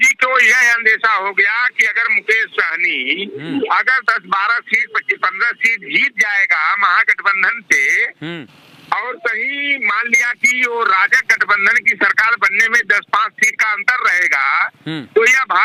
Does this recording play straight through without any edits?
yes; 0 cuts

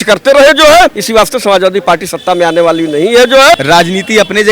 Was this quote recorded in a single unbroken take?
no; 2 cuts; at 1.0 s, 3.6 s

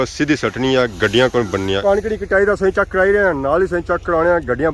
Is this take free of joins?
no; 1 cut; at 1.8 s

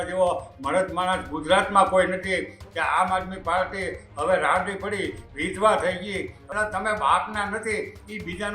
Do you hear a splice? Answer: yes; 2 cuts; at 2.6 s, 6.4 s

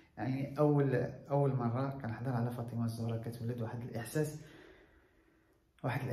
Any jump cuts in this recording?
no; 0 cuts

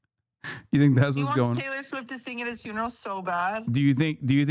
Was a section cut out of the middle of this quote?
no; 0 cuts

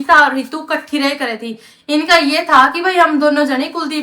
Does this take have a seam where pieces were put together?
no; 0 cuts

